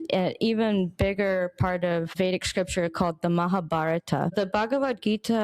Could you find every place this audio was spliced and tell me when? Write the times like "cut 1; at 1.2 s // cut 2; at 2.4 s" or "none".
cut 1; at 2.1 s // cut 2; at 4.3 s